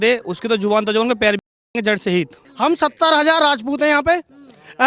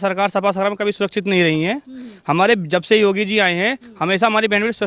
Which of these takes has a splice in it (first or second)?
first